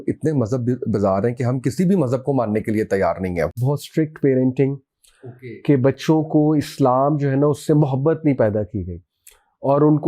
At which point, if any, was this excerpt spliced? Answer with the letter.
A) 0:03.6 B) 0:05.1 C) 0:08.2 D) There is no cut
A